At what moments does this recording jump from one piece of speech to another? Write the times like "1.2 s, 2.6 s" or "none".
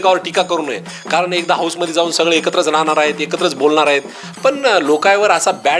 none